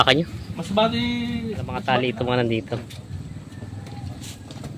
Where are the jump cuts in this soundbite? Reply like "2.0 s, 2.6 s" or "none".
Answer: 1.8 s